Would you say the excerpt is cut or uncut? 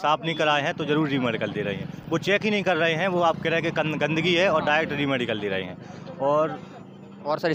uncut